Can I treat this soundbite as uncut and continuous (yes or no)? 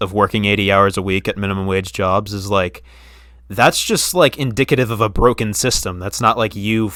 yes